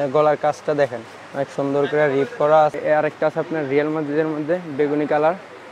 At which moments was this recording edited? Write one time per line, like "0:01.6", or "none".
0:02.7